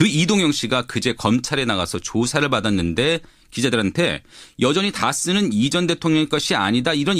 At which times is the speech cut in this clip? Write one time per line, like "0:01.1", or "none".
0:03.4